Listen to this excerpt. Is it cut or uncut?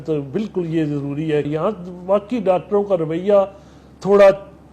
cut